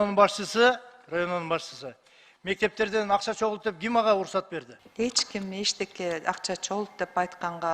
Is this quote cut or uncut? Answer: cut